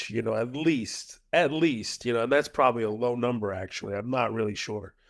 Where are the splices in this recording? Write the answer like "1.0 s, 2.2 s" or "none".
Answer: none